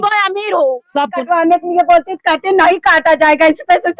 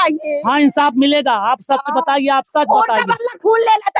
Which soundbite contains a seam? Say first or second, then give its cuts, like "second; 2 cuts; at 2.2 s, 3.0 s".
first; 1 cut; at 1.1 s